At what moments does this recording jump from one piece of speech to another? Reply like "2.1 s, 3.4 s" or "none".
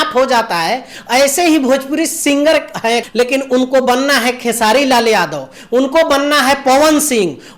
3.1 s